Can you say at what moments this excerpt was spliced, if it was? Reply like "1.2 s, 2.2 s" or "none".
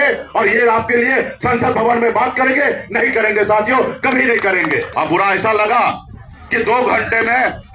4.9 s